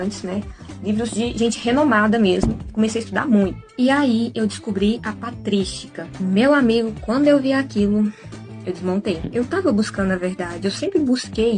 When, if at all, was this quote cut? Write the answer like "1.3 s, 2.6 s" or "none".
4.1 s